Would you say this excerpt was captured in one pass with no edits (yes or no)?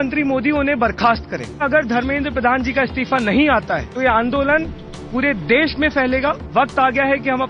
no